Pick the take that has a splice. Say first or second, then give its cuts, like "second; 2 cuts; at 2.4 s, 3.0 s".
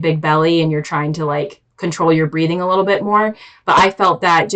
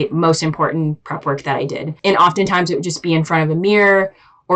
second; 1 cut; at 1.9 s